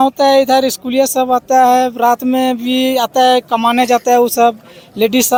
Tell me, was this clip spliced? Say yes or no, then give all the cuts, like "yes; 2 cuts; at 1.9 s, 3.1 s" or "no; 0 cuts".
no; 0 cuts